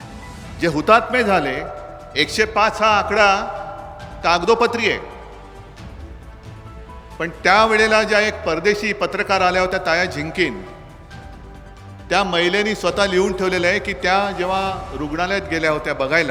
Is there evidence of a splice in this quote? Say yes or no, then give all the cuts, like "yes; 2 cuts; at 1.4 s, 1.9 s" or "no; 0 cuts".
no; 0 cuts